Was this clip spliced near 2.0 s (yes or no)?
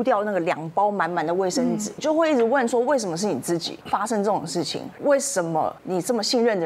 yes